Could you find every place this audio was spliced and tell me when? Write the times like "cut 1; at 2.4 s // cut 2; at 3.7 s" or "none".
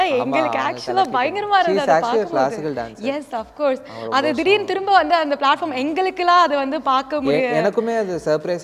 none